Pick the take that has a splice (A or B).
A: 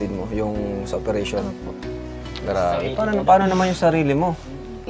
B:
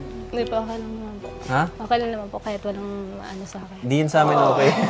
A